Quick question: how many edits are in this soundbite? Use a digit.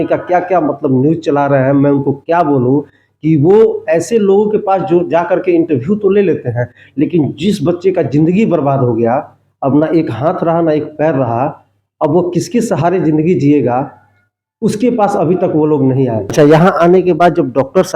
1